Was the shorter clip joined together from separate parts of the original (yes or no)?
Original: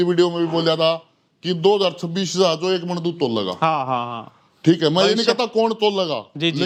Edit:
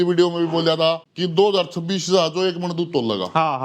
yes